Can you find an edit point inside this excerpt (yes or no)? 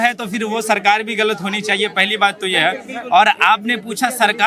no